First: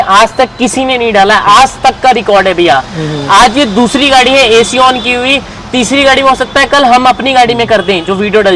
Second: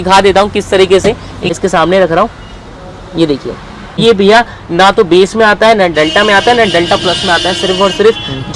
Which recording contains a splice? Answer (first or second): second